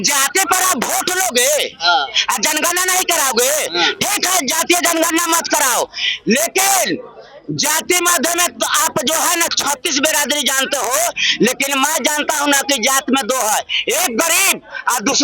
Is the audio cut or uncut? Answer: uncut